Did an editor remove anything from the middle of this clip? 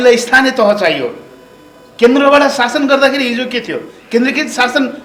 no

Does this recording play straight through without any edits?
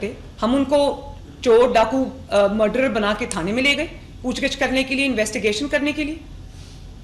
yes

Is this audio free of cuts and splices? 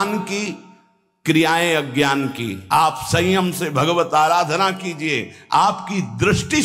no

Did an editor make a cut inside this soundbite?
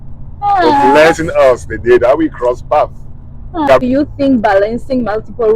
yes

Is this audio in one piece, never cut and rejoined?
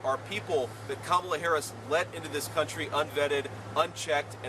yes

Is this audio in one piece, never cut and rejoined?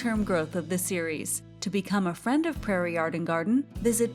yes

